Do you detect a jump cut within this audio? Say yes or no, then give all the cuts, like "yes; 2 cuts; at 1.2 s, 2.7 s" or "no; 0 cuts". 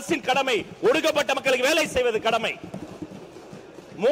no; 0 cuts